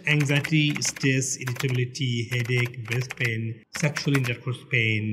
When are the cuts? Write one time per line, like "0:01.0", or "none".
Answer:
none